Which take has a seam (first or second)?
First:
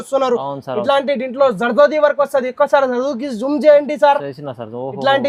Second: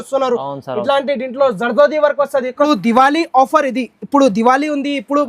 second